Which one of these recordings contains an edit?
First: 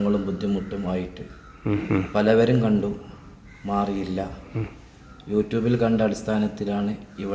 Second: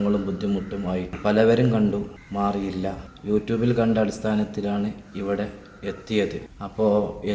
second; 4 cuts; at 1.2 s, 2.2 s, 3.1 s, 6.4 s

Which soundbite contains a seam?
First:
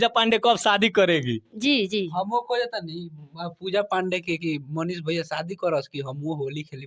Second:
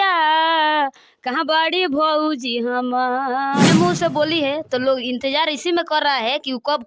second; 1 cut; at 3.6 s

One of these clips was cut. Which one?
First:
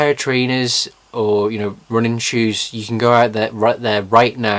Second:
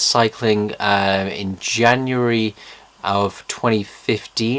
second; 1 cut; at 1.2 s

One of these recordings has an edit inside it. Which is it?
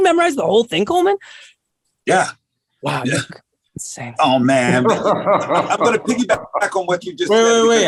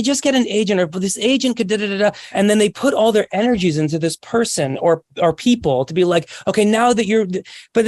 second; 1 cut; at 2.2 s

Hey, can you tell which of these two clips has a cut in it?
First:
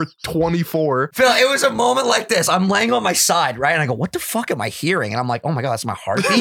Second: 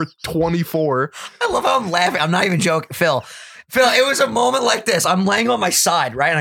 first; 1 cut; at 1.1 s

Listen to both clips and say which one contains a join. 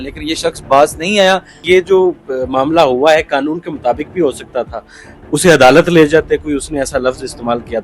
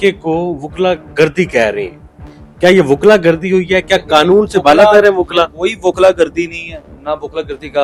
first; 1 cut; at 1.6 s

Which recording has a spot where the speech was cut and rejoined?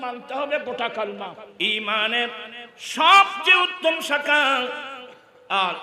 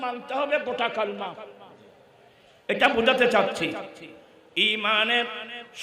first; 1 cut; at 1.4 s

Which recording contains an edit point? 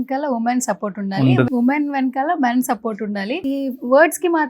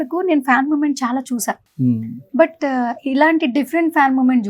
first; 2 cuts; at 1.5 s, 3.4 s

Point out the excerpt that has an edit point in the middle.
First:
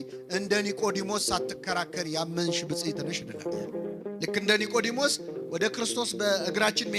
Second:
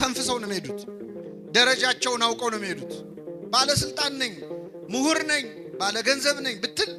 first; 1 cut; at 3.7 s

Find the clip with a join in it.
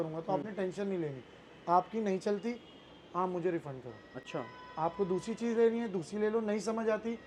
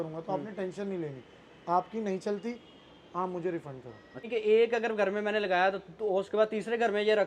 second; 1 cut; at 4.3 s

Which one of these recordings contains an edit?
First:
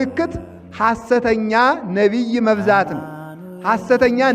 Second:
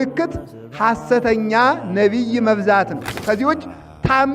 second; 1 cut; at 3.2 s

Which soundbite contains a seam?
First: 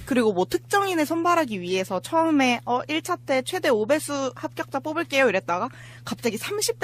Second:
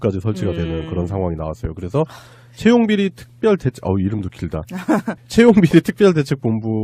first; 1 cut; at 4.2 s

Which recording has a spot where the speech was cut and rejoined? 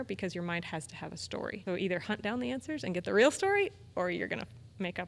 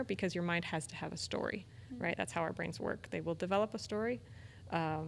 first; 1 cut; at 1.6 s

